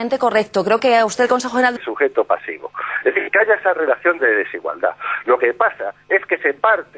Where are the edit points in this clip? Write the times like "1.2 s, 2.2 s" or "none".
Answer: none